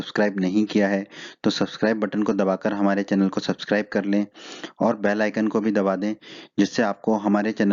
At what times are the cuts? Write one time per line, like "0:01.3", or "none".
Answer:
none